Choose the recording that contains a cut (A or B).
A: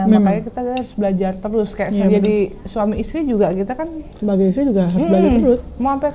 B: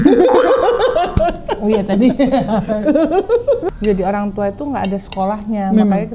B